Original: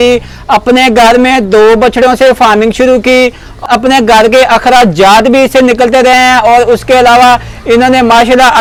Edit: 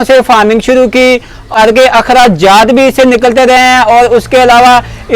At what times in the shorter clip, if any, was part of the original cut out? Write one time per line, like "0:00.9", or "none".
0:01.6

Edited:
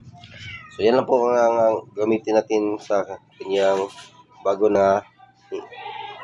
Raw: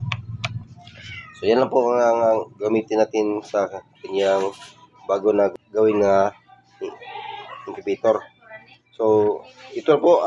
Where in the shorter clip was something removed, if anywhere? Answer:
0:04.8

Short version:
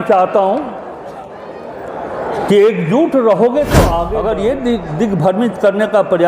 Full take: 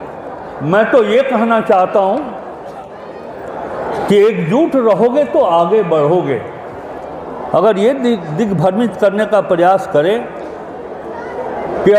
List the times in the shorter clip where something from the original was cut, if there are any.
0:04.1

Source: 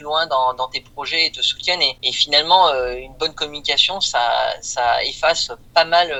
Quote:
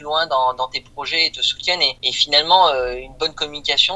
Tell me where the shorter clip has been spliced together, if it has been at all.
none

